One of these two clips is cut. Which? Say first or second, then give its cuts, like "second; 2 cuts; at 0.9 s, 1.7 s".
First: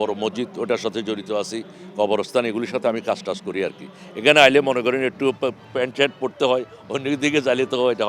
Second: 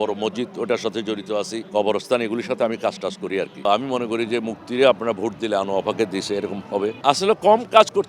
second; 3 cuts; at 1.6 s, 3.6 s, 7.0 s